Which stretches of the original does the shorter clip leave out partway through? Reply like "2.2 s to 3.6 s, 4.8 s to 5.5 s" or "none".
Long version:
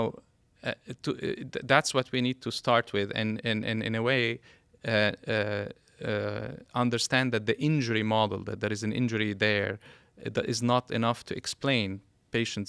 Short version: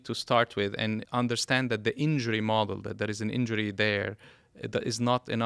3.4 s to 6.7 s